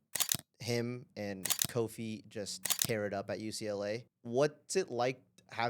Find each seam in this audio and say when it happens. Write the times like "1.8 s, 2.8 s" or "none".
4.1 s